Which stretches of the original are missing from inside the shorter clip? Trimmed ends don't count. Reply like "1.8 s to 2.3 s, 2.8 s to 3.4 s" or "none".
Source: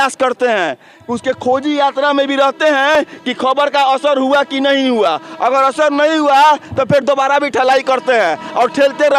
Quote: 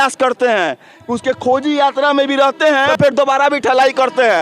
2.9 s to 6.8 s